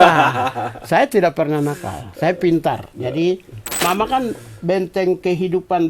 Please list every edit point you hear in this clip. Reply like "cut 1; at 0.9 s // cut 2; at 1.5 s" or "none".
cut 1; at 3.8 s

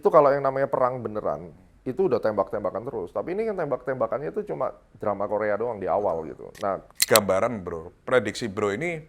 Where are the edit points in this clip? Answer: cut 1; at 6.9 s

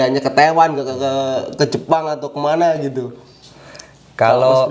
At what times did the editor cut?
none

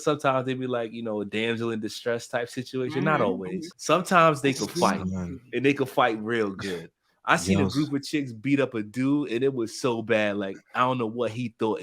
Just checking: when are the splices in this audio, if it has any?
cut 1; at 3.7 s

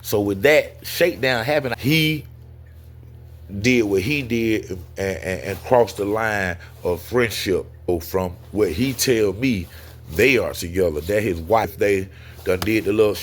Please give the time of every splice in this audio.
cut 1; at 1.7 s // cut 2; at 7.9 s // cut 3; at 11.7 s

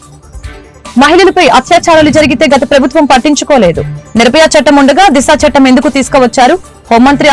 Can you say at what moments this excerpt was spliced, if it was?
none

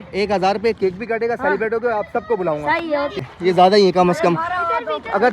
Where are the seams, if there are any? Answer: cut 1; at 3.2 s

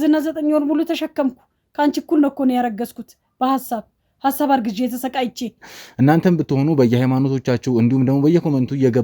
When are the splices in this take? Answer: cut 1; at 5.8 s

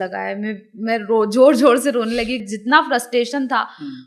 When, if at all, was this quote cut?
cut 1; at 2.4 s

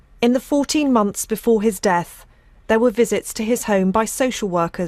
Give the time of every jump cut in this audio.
none

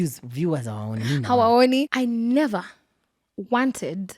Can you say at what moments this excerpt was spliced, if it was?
cut 1; at 1.9 s

